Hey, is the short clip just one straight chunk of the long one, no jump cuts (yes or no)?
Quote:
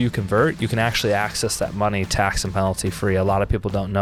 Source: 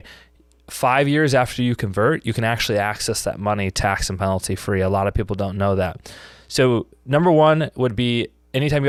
yes